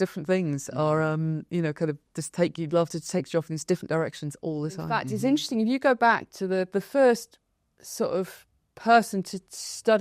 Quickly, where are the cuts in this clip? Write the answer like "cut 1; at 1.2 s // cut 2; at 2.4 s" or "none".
cut 1; at 5.1 s